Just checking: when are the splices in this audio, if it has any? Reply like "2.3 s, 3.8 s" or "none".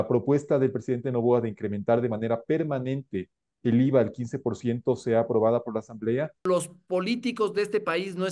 6.4 s